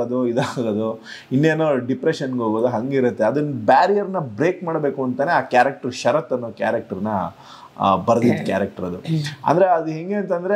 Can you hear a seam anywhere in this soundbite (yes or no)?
no